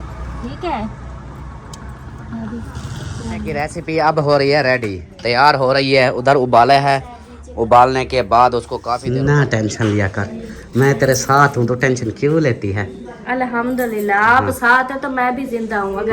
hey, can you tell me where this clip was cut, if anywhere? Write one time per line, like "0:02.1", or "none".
0:03.6
0:09.0